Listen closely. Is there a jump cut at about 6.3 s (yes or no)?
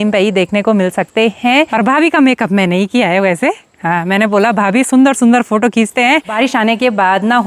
yes